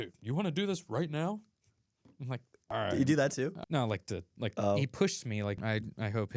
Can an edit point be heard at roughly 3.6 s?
yes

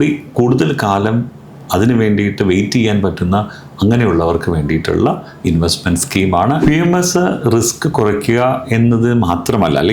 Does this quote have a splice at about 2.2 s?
no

